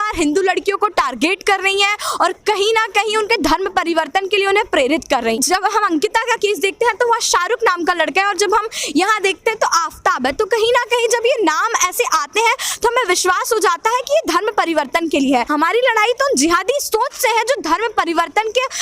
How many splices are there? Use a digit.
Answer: 2